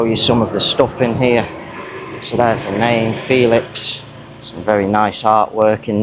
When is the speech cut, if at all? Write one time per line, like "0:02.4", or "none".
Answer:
none

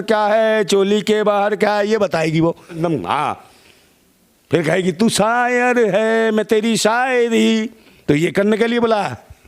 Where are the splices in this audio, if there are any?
0:02.8

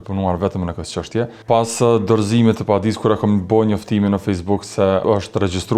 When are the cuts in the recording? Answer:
0:01.4
0:05.0

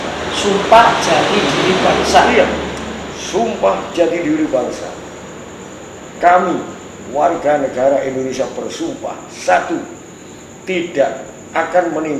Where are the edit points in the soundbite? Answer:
none

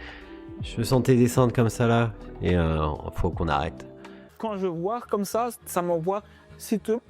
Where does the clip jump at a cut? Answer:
0:04.3

